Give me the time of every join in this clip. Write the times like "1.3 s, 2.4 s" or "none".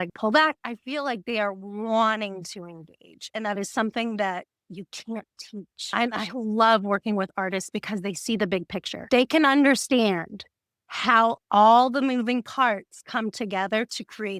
5.8 s